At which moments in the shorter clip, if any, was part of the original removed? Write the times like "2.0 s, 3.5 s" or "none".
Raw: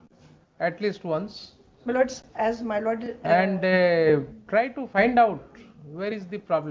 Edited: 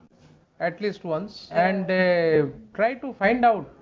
1.4 s